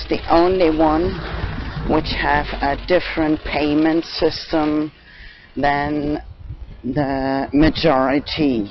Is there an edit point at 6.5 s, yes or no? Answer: yes